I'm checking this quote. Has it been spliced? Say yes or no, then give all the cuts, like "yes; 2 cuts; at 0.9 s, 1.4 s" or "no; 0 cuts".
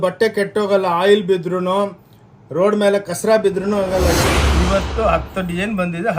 yes; 1 cut; at 4.2 s